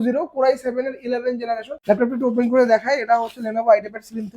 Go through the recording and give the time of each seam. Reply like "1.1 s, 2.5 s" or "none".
1.7 s